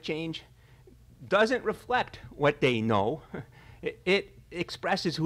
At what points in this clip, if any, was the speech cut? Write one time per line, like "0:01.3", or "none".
0:01.4